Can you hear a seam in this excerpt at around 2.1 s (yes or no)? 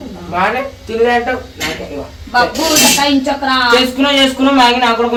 no